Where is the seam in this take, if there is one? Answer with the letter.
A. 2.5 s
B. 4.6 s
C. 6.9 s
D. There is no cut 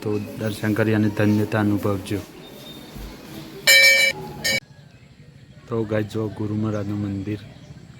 B